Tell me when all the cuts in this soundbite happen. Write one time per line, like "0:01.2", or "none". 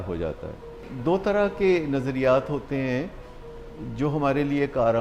0:00.9